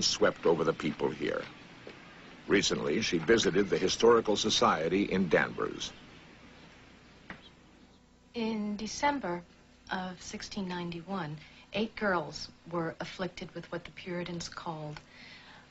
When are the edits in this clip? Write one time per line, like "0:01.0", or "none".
0:11.1